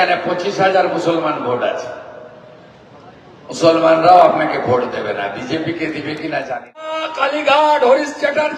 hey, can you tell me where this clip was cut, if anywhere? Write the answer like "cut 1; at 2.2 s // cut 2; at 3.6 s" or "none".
cut 1; at 7.1 s